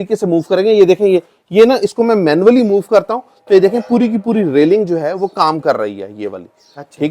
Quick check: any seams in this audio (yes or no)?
no